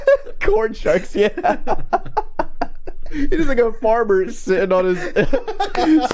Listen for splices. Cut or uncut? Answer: cut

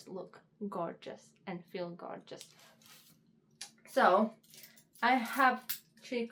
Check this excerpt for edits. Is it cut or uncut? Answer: uncut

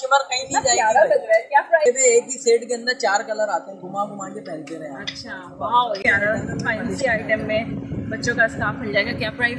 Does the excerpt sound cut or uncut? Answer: cut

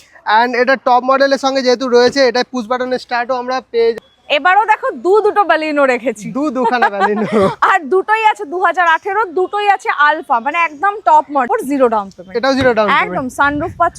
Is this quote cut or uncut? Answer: cut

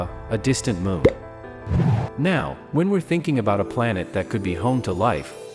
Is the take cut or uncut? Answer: cut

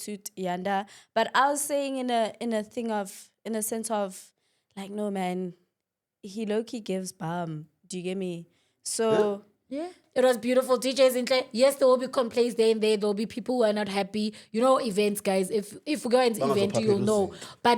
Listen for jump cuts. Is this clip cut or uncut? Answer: cut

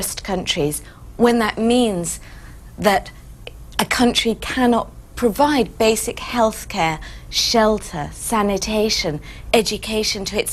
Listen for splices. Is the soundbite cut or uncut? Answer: cut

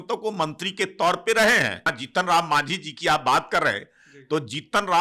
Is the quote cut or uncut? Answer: cut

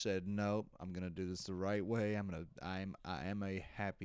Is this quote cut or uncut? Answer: uncut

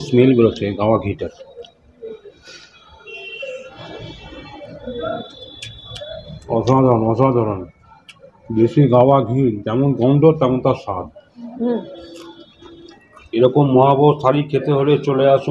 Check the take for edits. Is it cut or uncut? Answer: cut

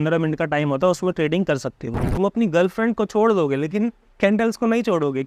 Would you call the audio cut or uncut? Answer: cut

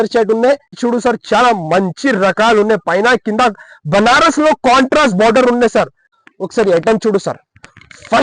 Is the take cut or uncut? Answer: cut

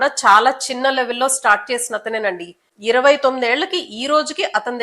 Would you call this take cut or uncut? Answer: uncut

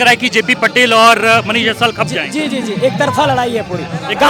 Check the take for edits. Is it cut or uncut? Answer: uncut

